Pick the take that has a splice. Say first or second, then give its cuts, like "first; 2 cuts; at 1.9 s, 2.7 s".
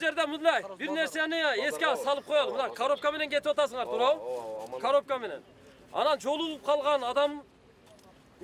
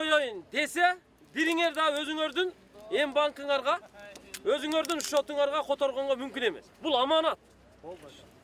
second; 1 cut; at 6.7 s